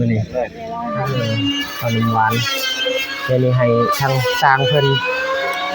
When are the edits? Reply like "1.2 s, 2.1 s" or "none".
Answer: 0.9 s